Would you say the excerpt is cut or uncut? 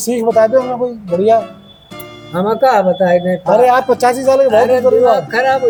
uncut